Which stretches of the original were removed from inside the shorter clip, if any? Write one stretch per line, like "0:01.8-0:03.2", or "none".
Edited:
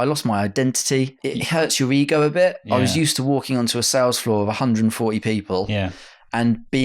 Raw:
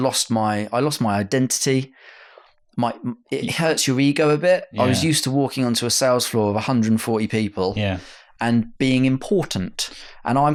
0:01.9-0:03.2